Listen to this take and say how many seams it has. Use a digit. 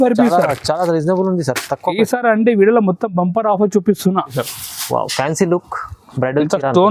1